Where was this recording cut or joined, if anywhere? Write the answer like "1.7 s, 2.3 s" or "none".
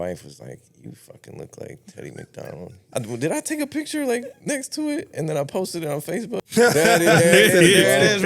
2.7 s, 6.4 s